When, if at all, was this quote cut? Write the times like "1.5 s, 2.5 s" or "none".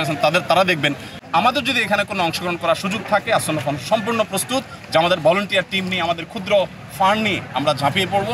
1.1 s

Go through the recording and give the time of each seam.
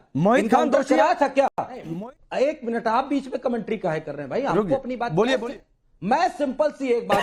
1.9 s, 5.4 s

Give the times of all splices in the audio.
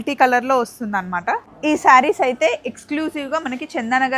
1.5 s

